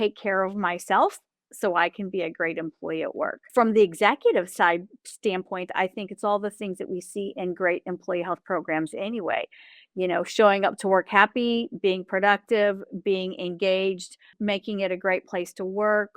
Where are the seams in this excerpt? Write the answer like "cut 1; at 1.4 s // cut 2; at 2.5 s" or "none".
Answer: cut 1; at 3.4 s // cut 2; at 14.3 s